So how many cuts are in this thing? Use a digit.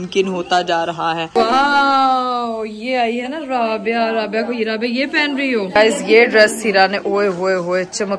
2